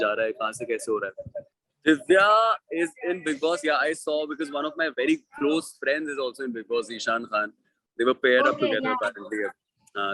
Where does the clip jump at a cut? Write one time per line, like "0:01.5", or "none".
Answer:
0:01.6